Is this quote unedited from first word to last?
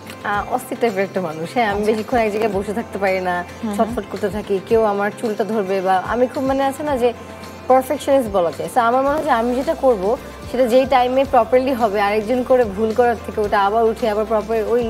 yes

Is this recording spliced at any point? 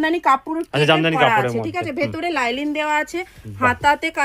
no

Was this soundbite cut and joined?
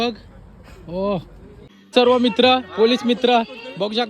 yes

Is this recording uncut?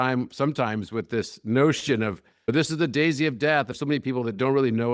no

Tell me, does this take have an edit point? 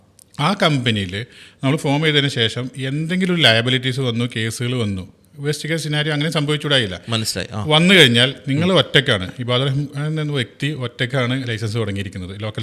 no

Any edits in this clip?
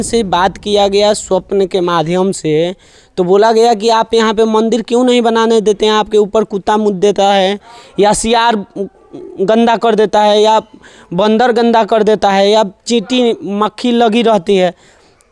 no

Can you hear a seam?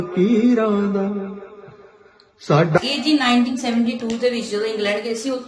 yes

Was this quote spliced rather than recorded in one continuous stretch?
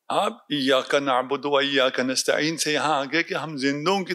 no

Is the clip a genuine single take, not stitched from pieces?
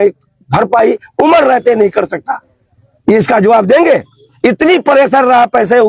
yes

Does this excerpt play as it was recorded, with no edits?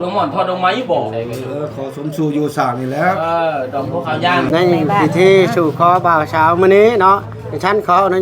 no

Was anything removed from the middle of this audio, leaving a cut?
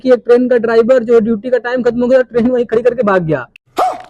no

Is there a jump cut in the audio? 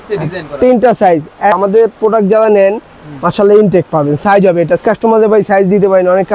yes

